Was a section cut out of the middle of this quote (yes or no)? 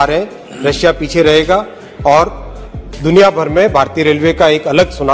no